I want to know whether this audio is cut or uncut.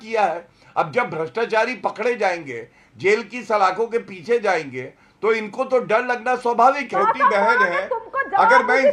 cut